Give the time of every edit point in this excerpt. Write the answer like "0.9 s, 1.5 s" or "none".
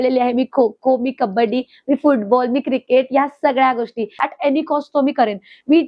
4.1 s